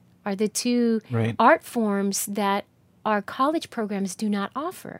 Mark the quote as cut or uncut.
uncut